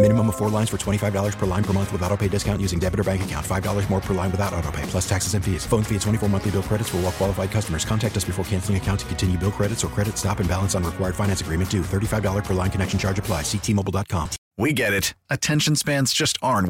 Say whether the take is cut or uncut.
cut